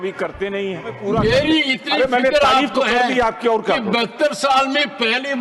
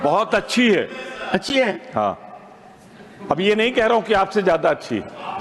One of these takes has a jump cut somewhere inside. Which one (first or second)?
first